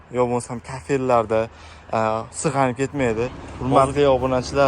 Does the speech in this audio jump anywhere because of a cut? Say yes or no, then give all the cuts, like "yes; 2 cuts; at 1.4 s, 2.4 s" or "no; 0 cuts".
yes; 1 cut; at 3.5 s